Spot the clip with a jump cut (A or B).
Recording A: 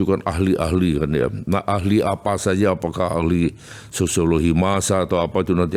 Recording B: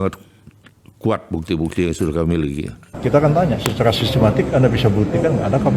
B